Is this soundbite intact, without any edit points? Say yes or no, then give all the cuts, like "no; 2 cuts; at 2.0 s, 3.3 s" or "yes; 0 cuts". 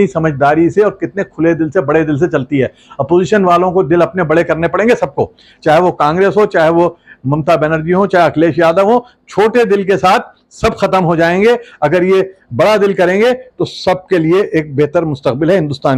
yes; 0 cuts